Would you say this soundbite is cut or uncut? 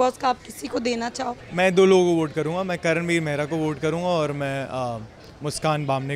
cut